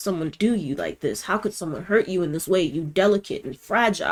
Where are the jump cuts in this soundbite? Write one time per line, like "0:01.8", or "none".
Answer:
none